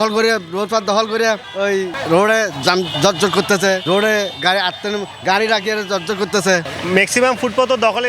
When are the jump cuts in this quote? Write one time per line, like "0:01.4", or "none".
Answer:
0:01.4
0:06.7